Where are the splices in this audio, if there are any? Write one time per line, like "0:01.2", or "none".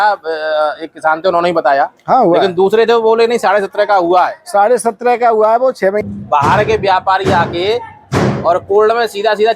0:06.0